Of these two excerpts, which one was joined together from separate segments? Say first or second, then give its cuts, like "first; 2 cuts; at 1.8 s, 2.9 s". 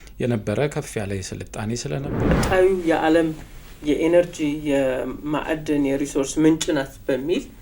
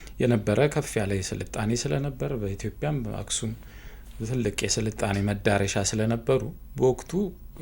first; 1 cut; at 2.4 s